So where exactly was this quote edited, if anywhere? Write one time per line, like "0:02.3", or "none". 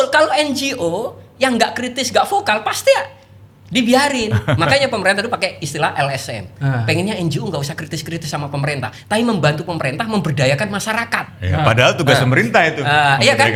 none